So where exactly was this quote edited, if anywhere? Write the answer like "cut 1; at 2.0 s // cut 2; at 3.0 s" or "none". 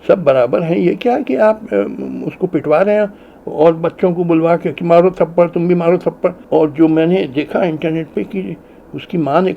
cut 1; at 6.4 s